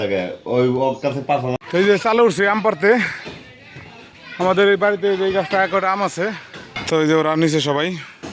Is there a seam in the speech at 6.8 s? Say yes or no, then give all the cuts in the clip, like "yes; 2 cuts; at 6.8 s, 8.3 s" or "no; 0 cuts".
yes; 2 cuts; at 1.6 s, 6.8 s